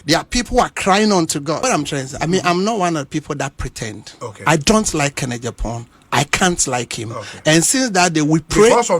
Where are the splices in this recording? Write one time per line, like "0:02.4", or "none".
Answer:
0:01.6